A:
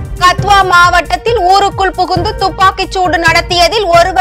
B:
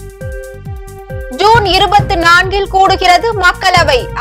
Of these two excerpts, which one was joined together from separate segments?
B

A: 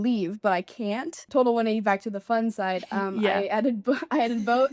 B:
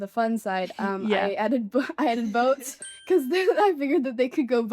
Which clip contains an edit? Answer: A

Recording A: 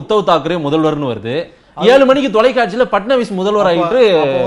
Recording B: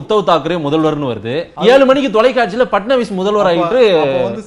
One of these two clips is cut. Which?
B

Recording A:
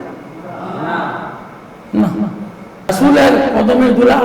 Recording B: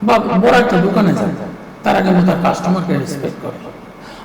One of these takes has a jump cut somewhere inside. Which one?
A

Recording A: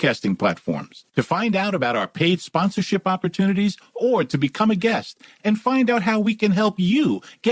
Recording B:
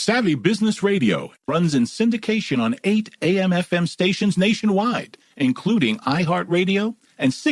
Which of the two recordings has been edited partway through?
B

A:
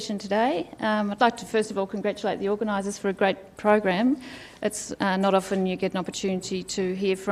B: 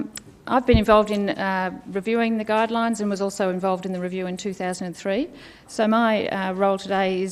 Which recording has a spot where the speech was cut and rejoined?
B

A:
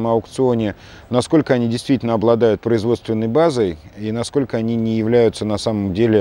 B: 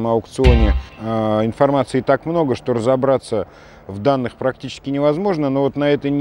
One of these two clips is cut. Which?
B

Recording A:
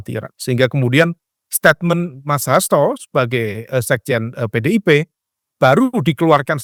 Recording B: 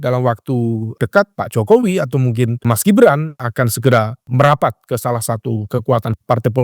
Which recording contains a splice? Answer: B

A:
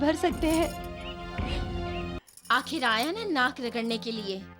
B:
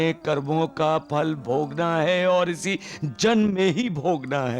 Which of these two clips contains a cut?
A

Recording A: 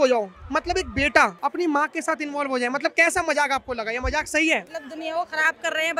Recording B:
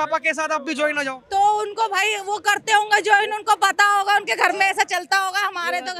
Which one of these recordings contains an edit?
A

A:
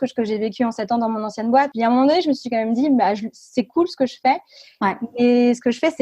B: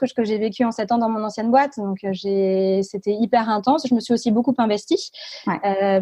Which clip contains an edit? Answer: A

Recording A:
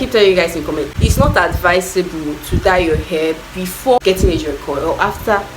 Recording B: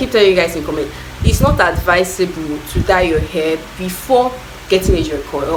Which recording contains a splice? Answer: A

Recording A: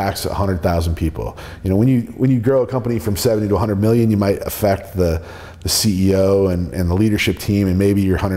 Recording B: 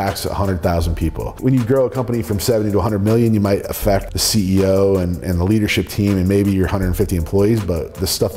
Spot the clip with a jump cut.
B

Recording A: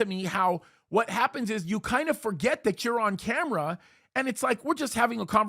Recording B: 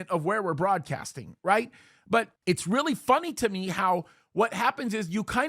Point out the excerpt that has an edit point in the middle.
B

